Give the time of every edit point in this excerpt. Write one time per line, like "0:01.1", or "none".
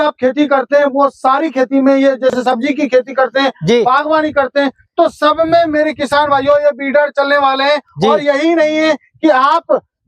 none